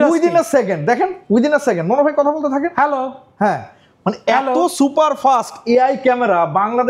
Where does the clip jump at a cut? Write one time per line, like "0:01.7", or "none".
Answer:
none